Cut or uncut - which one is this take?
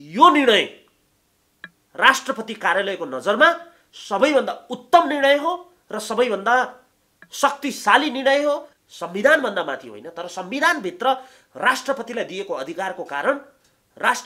cut